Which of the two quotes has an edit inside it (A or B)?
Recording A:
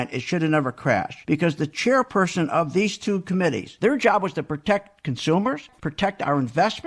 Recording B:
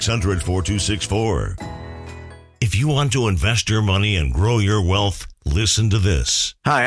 B